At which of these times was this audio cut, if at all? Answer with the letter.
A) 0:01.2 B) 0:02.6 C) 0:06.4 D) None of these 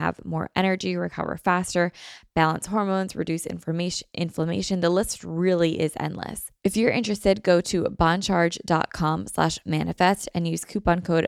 C